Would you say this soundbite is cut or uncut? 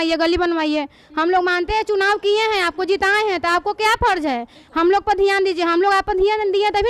uncut